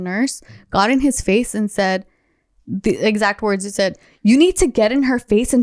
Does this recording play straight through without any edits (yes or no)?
yes